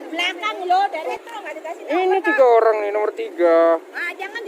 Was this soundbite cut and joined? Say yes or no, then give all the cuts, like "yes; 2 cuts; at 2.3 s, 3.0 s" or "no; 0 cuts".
yes; 1 cut; at 1.1 s